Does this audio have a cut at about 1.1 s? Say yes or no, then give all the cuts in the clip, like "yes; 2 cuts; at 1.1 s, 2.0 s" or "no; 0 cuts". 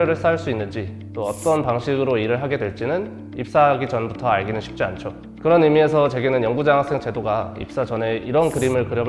no; 0 cuts